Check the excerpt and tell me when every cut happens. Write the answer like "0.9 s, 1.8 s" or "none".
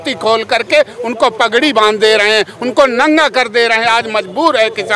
none